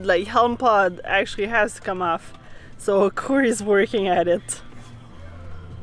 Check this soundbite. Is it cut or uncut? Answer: uncut